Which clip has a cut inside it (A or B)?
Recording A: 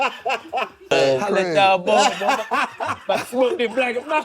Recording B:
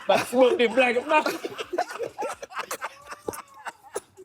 A